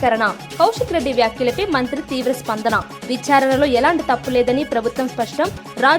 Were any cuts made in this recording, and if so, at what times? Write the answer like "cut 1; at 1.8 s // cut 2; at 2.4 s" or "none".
none